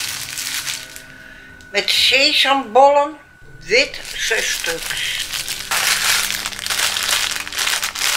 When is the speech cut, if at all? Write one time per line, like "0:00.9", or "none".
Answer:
0:05.8